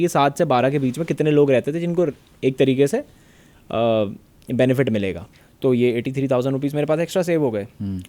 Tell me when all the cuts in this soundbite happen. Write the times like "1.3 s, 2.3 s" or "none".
5.2 s